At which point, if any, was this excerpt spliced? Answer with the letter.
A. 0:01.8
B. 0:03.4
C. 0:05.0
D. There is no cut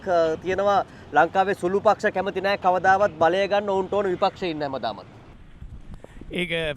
D